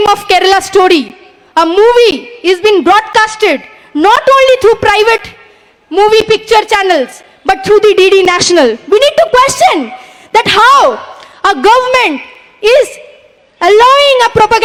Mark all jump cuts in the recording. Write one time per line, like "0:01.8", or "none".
none